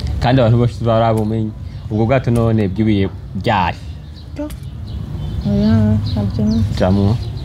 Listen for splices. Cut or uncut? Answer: uncut